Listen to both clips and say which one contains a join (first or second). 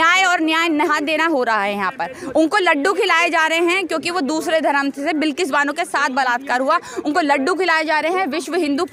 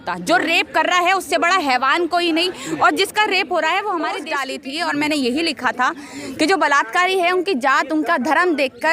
second